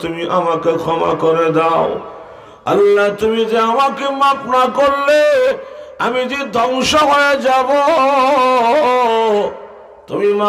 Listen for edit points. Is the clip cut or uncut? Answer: uncut